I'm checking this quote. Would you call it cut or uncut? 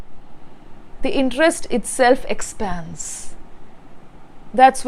uncut